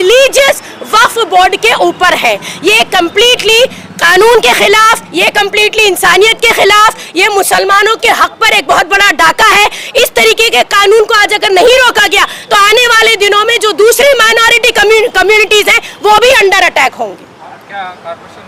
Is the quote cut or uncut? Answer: uncut